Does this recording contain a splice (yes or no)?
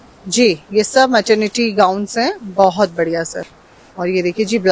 no